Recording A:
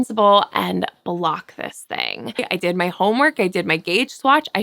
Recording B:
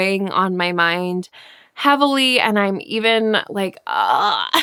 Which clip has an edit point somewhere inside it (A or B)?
A